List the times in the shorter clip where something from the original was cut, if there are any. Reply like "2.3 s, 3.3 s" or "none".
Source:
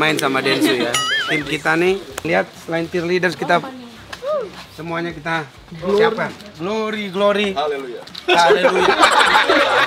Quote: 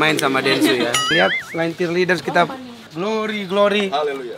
1.0 s, 2.8 s

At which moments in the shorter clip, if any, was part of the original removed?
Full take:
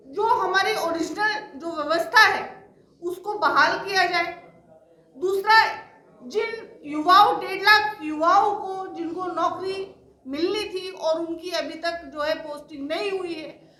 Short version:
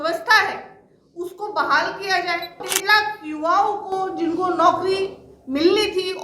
2.7 s

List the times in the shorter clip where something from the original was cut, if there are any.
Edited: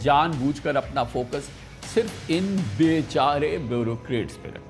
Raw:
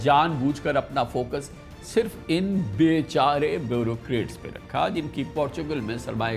none

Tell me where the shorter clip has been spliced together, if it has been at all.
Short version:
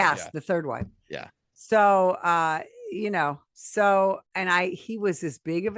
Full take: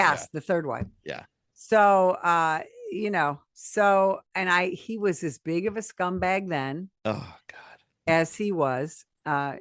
none

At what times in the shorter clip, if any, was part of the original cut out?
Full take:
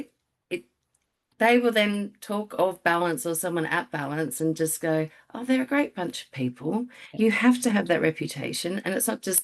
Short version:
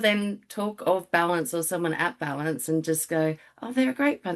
none

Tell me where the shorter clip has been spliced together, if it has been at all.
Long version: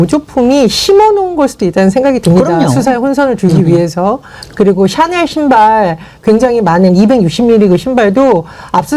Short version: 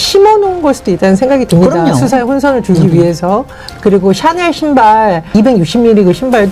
5.3 s

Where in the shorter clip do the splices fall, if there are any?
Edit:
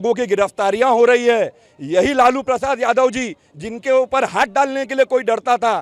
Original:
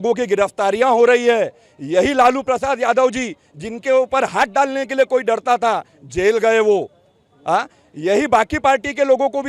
none

